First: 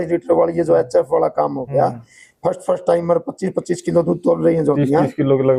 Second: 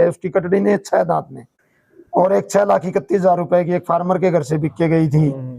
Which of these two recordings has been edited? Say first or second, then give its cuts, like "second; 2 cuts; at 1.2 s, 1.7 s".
second; 1 cut; at 1.4 s